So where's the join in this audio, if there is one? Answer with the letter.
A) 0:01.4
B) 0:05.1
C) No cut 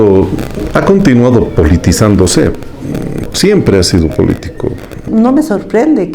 B